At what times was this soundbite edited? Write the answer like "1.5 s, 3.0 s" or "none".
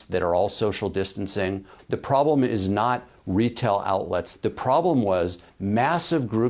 1.7 s, 4.3 s